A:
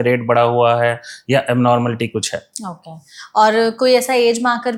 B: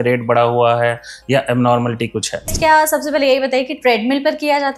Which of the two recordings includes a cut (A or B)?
B